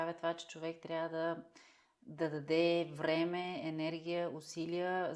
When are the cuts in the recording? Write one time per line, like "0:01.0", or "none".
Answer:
none

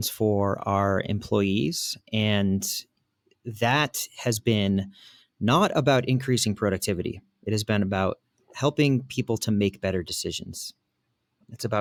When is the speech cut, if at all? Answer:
none

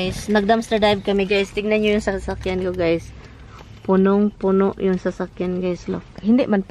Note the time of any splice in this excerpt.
none

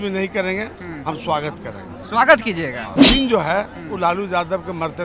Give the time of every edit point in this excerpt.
0:03.0

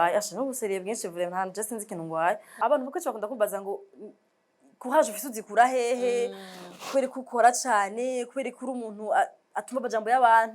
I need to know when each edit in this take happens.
0:02.5

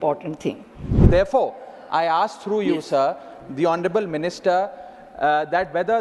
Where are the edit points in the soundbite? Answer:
0:01.0

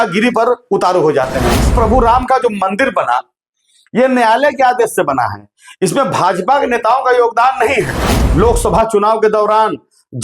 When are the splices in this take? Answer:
0:01.7
0:08.2

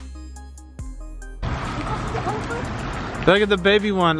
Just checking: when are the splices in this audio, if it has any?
0:01.4

